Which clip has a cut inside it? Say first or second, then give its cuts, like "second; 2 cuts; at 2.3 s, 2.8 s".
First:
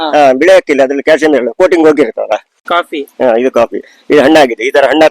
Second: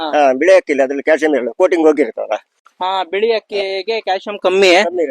first; 1 cut; at 2.5 s